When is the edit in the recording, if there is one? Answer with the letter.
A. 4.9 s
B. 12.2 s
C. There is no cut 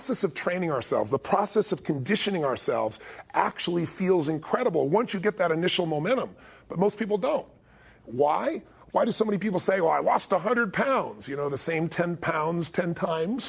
B